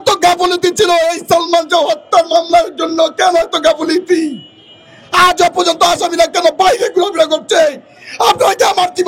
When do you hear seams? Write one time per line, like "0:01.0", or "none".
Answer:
none